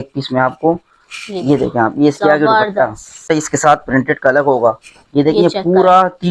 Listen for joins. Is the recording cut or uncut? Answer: cut